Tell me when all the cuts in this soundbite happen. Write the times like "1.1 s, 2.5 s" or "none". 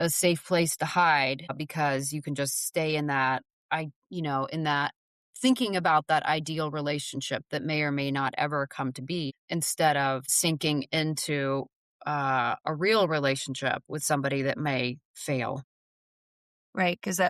none

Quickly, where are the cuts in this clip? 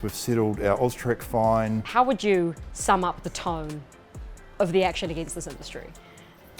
1.9 s

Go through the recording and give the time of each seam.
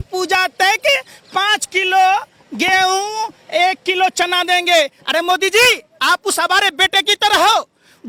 none

